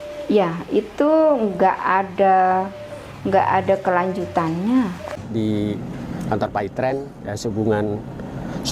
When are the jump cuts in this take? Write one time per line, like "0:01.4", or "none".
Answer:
0:05.1